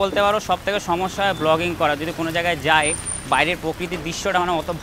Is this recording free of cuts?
yes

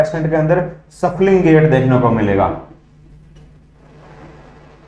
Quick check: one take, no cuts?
yes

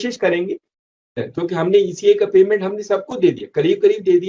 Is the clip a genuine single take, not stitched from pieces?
no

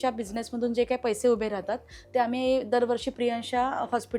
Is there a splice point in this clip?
no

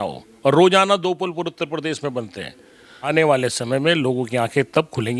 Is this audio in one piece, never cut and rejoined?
no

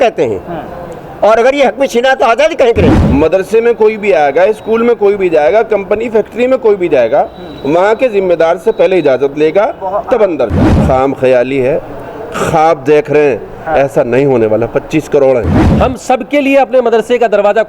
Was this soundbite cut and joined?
yes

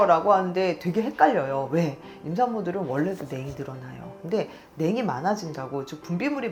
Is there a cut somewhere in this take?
no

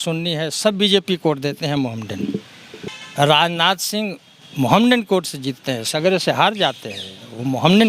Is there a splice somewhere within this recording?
yes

